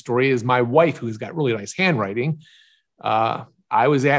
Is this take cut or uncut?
uncut